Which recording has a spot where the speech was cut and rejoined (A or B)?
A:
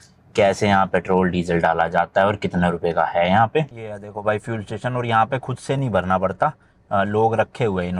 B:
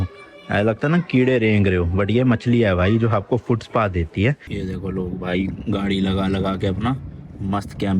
B